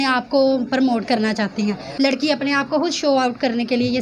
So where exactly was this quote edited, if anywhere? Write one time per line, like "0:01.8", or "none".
0:01.8